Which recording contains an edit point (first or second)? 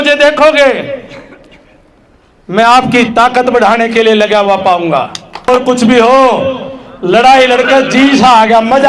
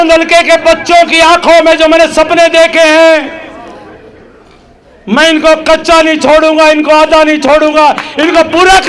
first